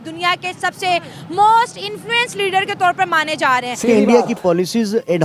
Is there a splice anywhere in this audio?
yes; 1 cut; at 3.8 s

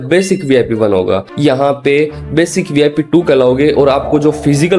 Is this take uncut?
no; 1 cut; at 1.3 s

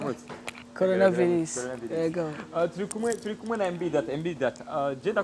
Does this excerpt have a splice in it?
no; 0 cuts

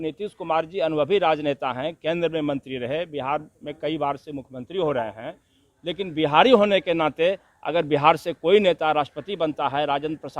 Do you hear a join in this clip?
yes; 1 cut; at 5.7 s

